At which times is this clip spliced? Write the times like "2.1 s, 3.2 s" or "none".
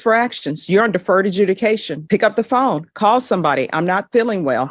none